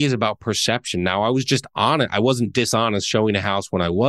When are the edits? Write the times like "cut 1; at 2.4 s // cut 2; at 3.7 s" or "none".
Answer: none